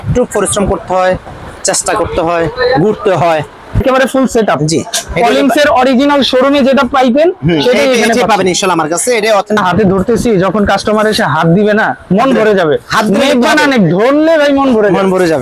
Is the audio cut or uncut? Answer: cut